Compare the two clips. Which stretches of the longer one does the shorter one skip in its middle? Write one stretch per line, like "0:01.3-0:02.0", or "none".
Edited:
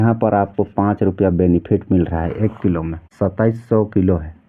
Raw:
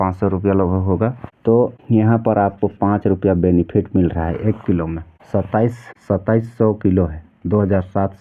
0:05.0-0:05.9